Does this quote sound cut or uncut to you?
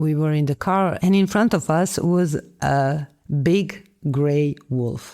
cut